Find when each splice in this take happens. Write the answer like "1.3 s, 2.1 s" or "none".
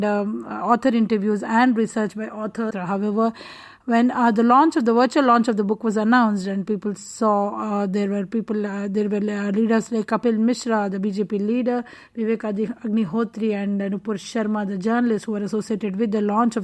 2.7 s